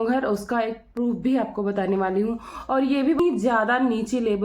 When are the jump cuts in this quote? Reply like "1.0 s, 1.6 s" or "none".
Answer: 3.2 s